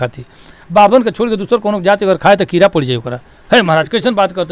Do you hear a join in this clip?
no; 0 cuts

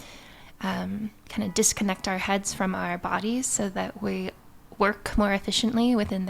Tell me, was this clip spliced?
yes; 1 cut; at 1.2 s

